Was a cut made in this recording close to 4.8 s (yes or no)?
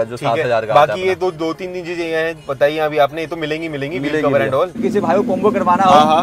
yes